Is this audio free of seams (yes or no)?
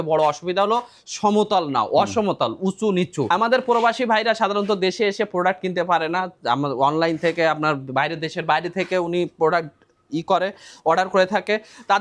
no